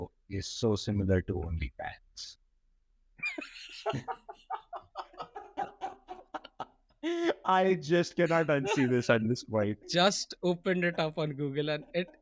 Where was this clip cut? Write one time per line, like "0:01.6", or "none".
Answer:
0:09.8